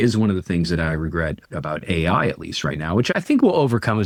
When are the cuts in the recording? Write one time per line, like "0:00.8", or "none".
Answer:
none